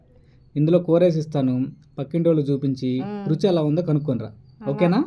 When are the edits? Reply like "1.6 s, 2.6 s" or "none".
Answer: none

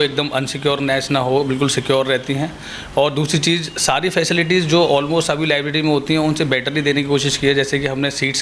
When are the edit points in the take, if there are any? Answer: none

